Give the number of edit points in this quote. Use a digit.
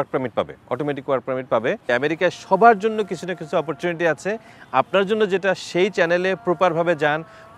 1